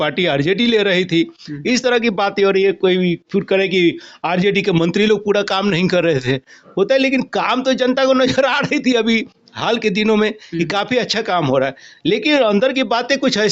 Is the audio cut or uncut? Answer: uncut